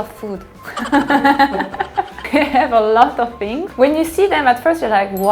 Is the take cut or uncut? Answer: cut